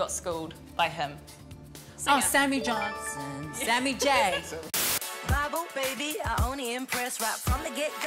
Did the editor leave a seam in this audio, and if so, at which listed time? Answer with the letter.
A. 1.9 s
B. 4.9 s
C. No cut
B